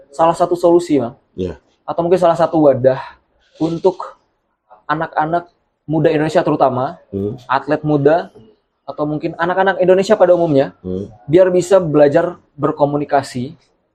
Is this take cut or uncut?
uncut